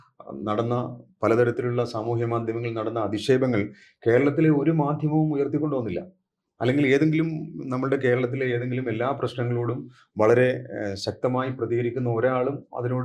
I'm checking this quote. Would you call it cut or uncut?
uncut